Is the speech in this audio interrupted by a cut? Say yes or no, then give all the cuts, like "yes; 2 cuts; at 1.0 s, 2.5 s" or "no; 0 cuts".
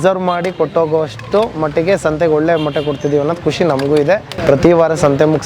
yes; 1 cut; at 4.3 s